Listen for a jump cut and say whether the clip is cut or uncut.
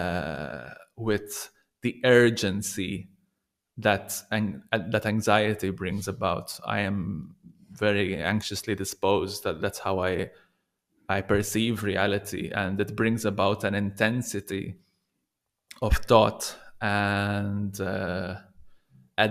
uncut